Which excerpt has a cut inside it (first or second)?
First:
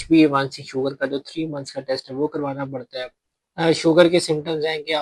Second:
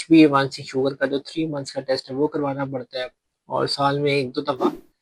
first